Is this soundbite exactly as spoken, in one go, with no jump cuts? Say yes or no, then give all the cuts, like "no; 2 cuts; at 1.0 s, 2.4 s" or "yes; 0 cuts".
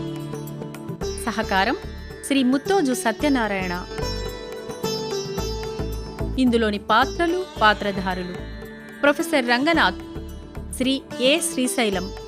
no; 3 cuts; at 0.9 s, 3.8 s, 6.3 s